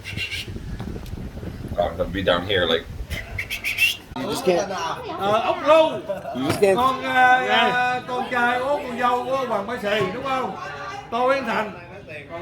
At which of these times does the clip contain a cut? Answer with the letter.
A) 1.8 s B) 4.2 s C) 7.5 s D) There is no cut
B